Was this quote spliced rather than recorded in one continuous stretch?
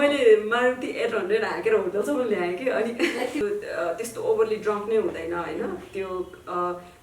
yes; 1 cut; at 3.4 s

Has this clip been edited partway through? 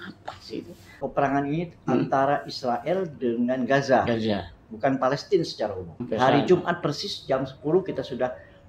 yes; 2 cuts; at 1.0 s, 5.9 s

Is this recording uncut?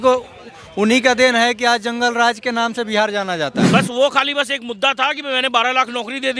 no; 1 cut; at 3.6 s

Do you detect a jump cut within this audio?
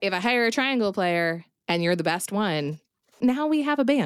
yes; 1 cut; at 3.2 s

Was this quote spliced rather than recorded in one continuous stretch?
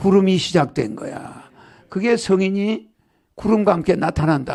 no; 0 cuts

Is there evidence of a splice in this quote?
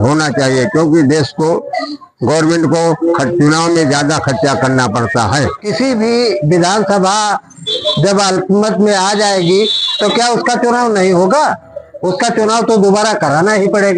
yes; 1 cut; at 5.6 s

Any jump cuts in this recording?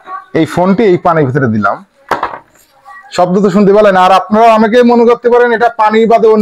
no; 0 cuts

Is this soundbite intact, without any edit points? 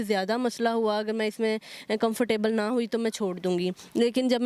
yes; 0 cuts

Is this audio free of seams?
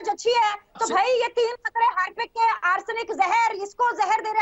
yes; 0 cuts

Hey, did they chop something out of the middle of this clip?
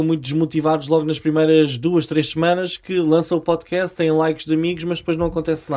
no; 0 cuts

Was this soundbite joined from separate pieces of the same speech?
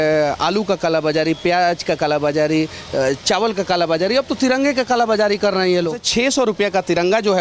yes; 1 cut; at 6.0 s

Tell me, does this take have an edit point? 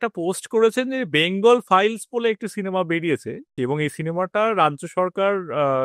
yes; 1 cut; at 3.5 s

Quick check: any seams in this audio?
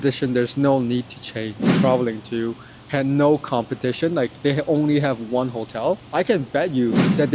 yes; 2 cuts; at 1.7 s, 6.0 s

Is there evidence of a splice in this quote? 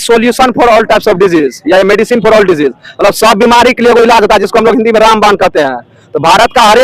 no; 0 cuts

